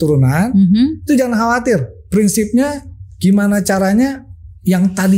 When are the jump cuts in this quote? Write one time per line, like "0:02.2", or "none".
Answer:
none